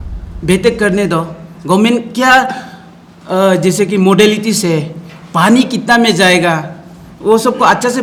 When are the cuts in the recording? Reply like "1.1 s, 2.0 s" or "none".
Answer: none